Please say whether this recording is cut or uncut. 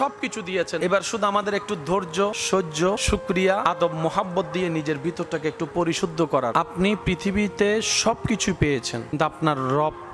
cut